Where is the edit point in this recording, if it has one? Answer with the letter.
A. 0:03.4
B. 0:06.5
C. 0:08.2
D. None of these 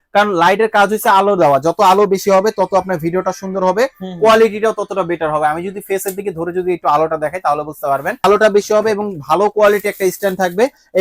C